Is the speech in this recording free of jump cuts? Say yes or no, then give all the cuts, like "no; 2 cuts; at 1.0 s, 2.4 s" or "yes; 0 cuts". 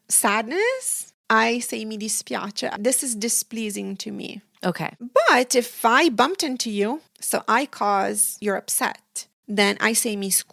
yes; 0 cuts